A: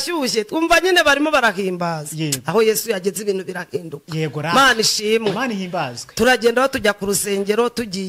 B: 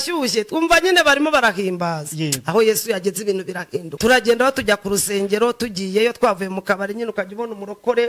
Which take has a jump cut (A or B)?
B